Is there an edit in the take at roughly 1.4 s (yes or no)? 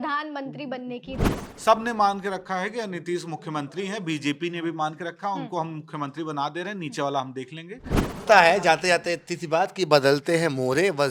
yes